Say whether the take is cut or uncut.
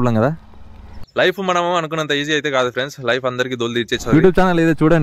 cut